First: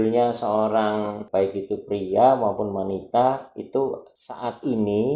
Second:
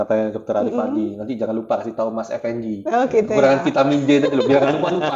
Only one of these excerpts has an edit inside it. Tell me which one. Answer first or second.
first